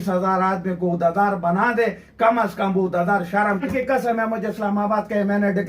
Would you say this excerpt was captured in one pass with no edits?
no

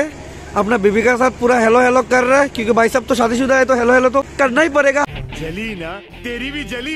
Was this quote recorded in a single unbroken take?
yes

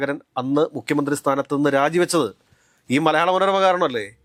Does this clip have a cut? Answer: no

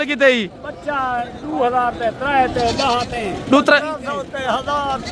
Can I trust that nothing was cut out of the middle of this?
yes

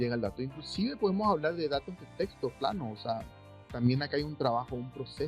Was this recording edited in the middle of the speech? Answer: yes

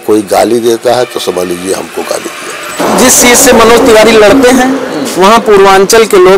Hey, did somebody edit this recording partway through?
yes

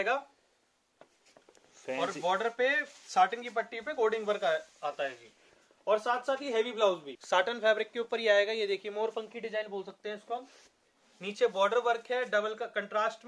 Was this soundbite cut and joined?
yes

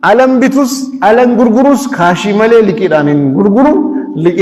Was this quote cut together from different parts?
no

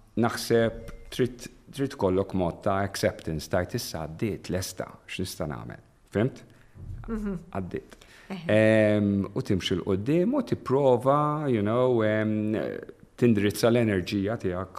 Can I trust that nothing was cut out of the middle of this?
yes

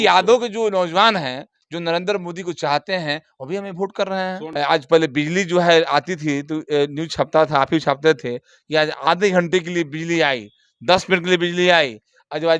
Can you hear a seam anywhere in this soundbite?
yes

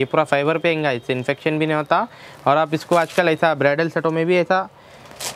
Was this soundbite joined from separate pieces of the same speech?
no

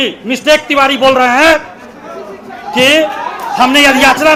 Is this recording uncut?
yes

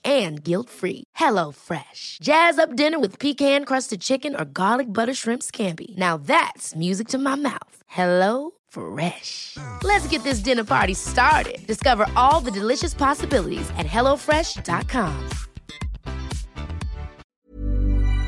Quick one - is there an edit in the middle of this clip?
yes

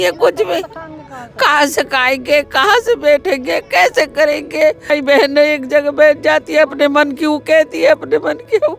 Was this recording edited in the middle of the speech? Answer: yes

